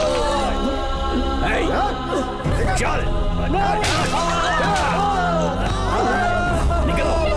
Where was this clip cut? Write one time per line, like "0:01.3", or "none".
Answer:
none

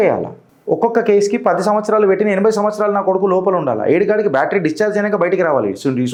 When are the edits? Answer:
none

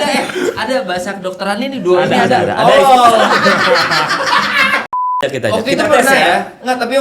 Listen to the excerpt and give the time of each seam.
0:05.0

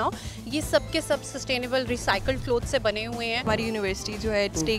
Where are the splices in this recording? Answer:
0:03.5

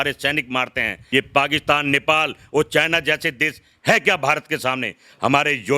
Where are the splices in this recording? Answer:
0:01.1

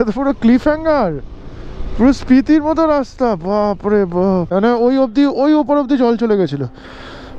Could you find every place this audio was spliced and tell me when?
0:04.5

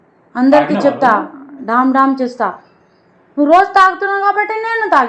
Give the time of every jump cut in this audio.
none

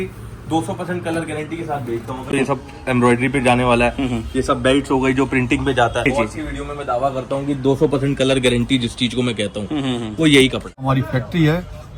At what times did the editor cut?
0:02.3
0:06.1
0:10.7

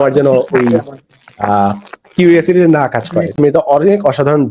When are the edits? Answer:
0:03.3

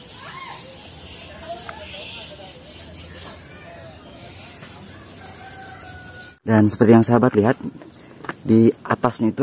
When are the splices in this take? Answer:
0:06.5

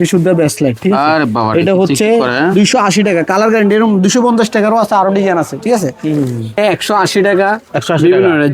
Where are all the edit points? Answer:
0:06.6

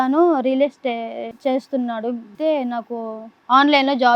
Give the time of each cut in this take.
0:01.3
0:02.3

